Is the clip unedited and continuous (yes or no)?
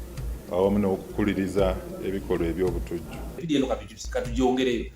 no